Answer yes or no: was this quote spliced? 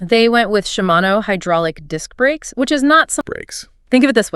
yes